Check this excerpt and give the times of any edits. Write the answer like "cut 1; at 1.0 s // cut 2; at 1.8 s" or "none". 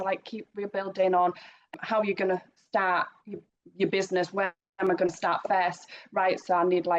cut 1; at 1.7 s